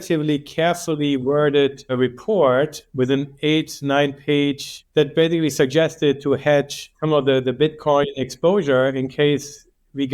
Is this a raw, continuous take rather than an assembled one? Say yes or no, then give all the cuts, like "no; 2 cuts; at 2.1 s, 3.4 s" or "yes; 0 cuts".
yes; 0 cuts